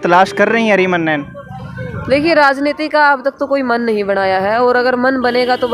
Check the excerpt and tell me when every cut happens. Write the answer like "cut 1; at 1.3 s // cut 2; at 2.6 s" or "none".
none